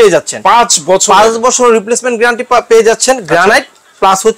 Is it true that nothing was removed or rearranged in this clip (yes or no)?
yes